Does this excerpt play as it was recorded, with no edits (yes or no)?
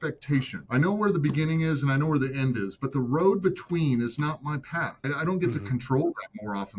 no